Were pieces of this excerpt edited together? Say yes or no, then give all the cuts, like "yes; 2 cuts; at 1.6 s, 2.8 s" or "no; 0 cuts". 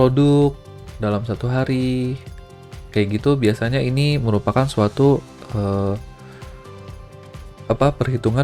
yes; 2 cuts; at 6.0 s, 7.7 s